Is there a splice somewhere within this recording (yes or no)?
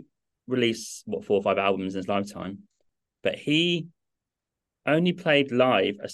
no